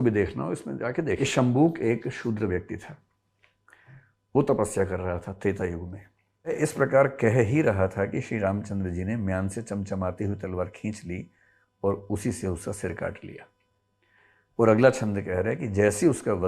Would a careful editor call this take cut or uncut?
cut